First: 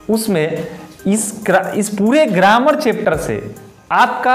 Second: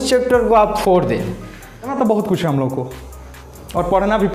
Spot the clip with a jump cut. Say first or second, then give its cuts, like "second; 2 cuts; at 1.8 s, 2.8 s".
second; 1 cut; at 1.8 s